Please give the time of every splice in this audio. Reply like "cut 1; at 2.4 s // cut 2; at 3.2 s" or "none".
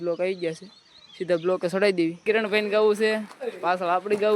cut 1; at 2.2 s

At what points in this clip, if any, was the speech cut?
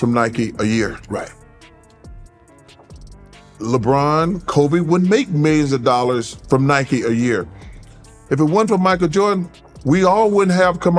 cut 1; at 1.9 s // cut 2; at 3.6 s

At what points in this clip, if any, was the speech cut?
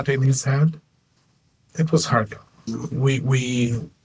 cut 1; at 1.6 s

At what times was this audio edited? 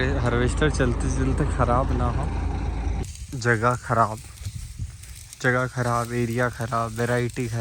cut 1; at 3.0 s

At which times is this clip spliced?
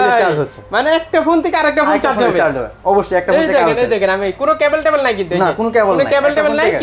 none

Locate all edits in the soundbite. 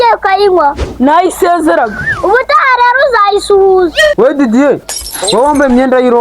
cut 1; at 4.1 s

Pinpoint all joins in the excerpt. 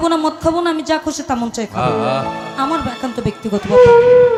none

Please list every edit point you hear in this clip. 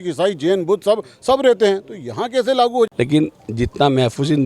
cut 1; at 2.9 s

